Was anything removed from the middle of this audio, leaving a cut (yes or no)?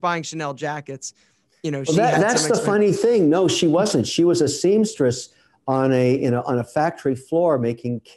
no